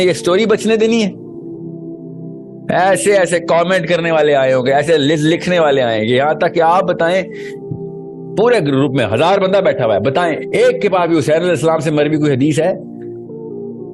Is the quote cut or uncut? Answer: cut